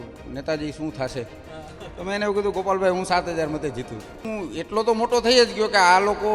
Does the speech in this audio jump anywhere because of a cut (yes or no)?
yes